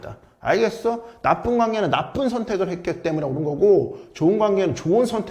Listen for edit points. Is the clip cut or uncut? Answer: uncut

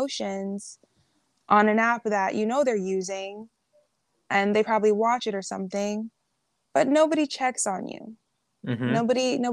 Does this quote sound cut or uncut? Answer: uncut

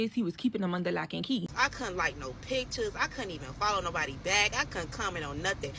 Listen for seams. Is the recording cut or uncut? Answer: cut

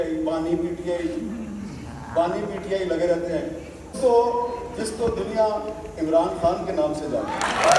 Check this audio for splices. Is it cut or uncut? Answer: cut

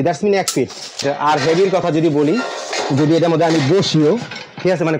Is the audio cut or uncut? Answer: cut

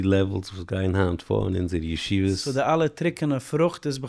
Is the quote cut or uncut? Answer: cut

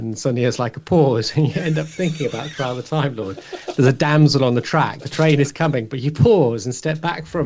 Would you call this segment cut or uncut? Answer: uncut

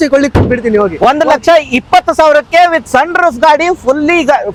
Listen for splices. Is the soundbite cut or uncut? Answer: uncut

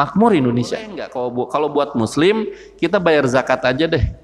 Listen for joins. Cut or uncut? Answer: cut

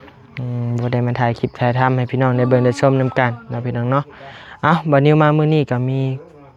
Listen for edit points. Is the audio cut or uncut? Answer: uncut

